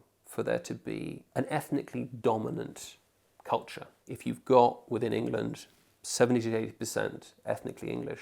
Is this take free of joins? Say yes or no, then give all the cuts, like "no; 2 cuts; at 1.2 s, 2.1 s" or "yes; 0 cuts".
no; 2 cuts; at 1.2 s, 4.0 s